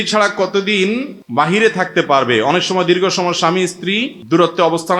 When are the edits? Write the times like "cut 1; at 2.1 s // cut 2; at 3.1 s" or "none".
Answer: cut 1; at 1.2 s // cut 2; at 4.1 s